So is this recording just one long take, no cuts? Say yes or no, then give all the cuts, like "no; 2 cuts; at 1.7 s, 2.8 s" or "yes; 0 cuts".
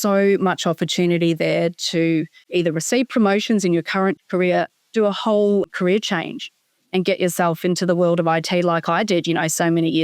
no; 3 cuts; at 2.4 s, 4.2 s, 5.7 s